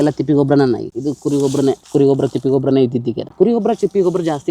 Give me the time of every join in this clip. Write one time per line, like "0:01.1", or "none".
0:00.9
0:03.3